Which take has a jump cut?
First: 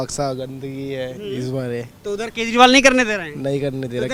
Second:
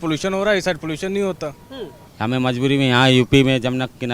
second; 1 cut; at 2.1 s

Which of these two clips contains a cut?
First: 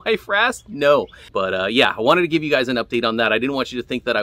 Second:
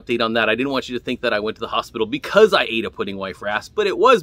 first; 1 cut; at 1.2 s

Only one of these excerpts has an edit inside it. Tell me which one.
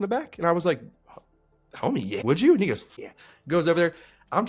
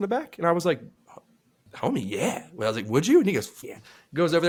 first; 1 cut; at 2.2 s

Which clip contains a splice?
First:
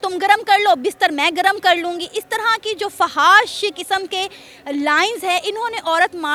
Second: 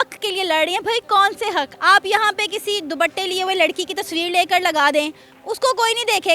second; 1 cut; at 1.7 s

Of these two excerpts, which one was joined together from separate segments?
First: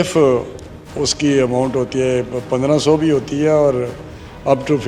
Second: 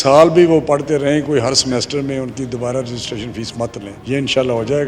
second; 1 cut; at 3.9 s

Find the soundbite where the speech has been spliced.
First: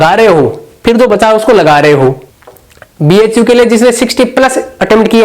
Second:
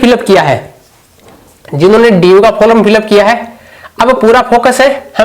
first; 1 cut; at 2.2 s

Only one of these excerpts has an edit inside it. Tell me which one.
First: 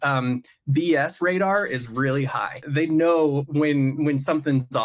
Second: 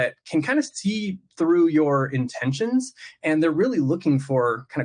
first; 1 cut; at 2.6 s

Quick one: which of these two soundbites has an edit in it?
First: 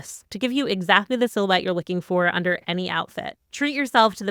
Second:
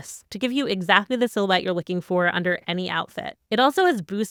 first; 1 cut; at 3.3 s

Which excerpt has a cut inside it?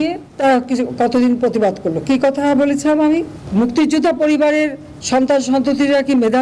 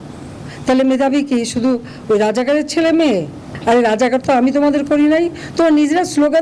second; 1 cut; at 3.5 s

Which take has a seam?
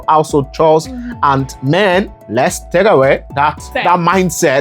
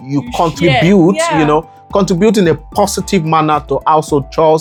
first; 2 cuts; at 2.2 s, 3.7 s

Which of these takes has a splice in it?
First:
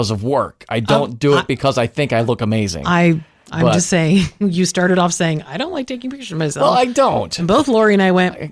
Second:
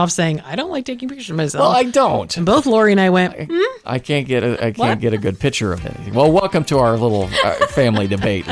first; 1 cut; at 3.4 s

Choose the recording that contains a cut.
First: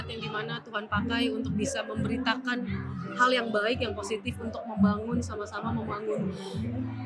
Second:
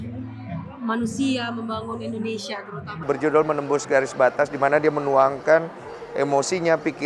second; 1 cut; at 3.0 s

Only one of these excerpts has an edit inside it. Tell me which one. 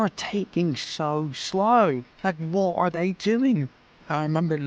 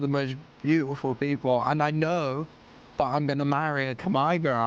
first; 1 cut; at 2.1 s

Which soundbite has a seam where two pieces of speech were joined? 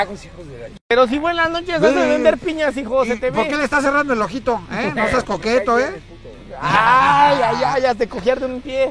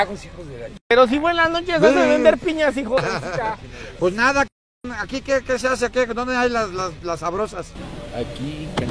second; 1 cut; at 3.0 s

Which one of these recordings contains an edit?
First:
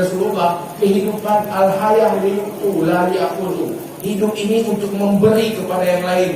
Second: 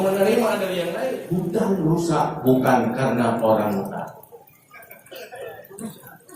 second; 1 cut; at 1.2 s

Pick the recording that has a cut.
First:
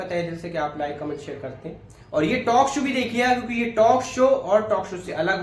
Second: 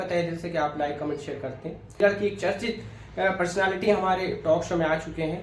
second; 1 cut; at 2.0 s

